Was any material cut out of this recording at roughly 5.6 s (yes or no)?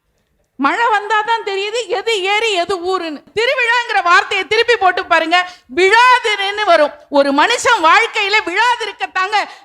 no